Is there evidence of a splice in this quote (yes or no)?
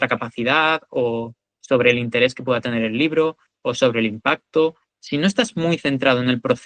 yes